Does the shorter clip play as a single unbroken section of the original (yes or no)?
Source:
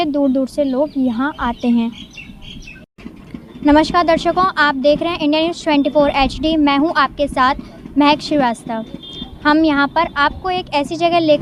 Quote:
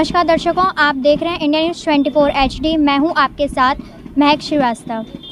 yes